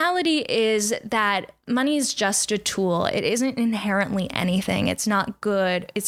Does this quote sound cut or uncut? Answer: uncut